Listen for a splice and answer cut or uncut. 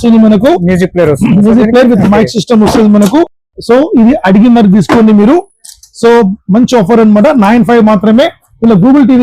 uncut